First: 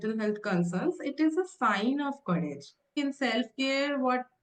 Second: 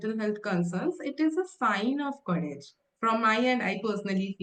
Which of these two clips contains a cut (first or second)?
first